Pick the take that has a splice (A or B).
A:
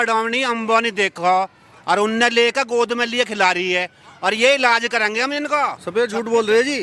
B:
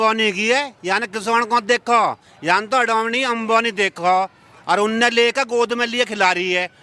A